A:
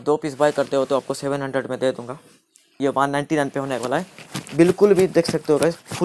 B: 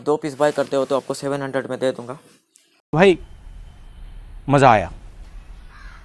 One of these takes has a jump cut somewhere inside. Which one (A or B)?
A